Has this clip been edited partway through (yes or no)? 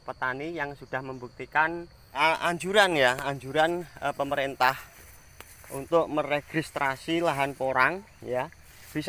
yes